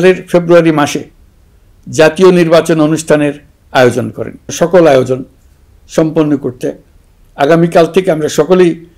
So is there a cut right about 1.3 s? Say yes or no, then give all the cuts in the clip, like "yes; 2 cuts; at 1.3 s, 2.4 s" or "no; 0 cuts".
no; 1 cut; at 4.5 s